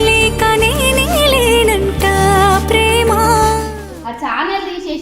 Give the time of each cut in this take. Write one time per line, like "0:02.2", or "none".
0:03.9

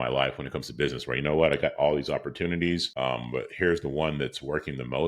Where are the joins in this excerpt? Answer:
0:02.9

